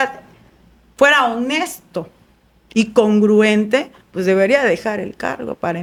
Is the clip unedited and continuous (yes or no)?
yes